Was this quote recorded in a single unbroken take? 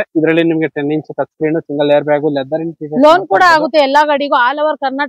yes; 0 cuts

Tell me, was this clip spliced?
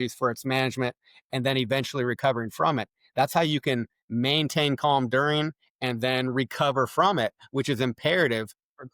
no; 0 cuts

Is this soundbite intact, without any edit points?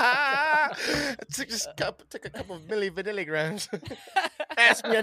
yes; 0 cuts

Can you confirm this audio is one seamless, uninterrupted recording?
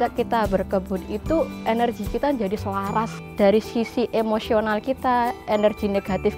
no; 1 cut; at 3.2 s

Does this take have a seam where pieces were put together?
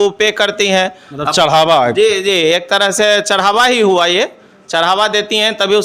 no; 0 cuts

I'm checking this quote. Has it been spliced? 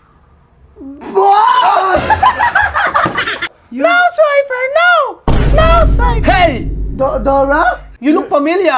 yes; 2 cuts; at 3.5 s, 7.9 s

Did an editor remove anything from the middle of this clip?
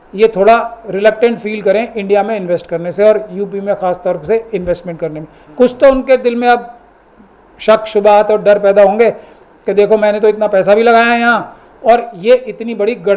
no; 0 cuts

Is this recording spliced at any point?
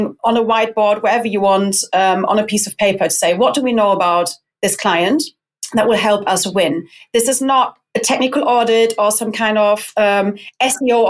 no; 0 cuts

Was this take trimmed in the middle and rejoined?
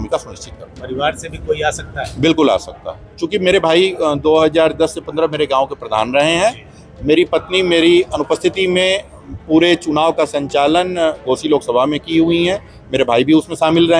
yes; 1 cut; at 3.1 s

